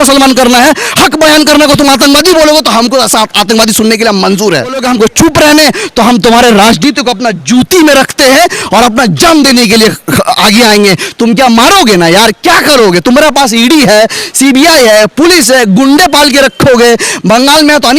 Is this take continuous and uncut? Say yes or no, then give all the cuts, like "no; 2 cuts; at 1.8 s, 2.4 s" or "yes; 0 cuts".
no; 1 cut; at 4.8 s